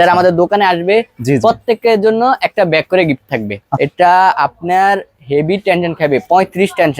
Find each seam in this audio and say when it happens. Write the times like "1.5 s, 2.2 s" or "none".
3.6 s